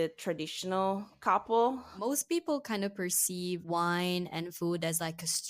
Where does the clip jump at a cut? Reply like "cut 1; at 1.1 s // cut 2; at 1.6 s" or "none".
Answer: cut 1; at 2.1 s // cut 2; at 3.6 s